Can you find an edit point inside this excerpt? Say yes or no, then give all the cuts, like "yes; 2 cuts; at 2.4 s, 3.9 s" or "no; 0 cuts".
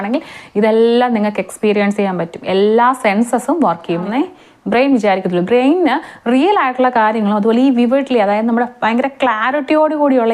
yes; 1 cut; at 4.0 s